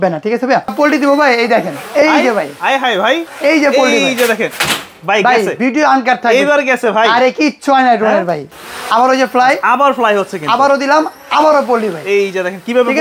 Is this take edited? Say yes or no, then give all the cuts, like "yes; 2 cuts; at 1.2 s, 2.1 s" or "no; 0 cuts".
yes; 3 cuts; at 0.7 s, 3.3 s, 8.5 s